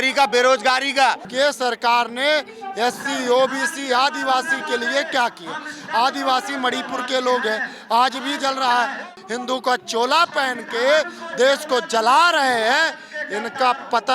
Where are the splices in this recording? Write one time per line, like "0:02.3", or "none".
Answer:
0:01.2
0:09.1